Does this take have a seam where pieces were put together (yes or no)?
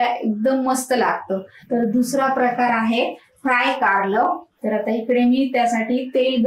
no